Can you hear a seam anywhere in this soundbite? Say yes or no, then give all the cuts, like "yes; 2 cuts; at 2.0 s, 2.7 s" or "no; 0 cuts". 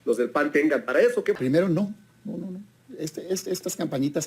yes; 1 cut; at 1.3 s